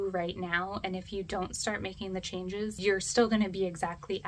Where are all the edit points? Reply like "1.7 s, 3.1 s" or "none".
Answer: 2.8 s